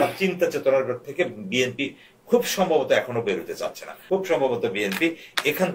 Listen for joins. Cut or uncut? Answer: cut